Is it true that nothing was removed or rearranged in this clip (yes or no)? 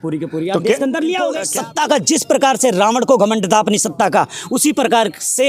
no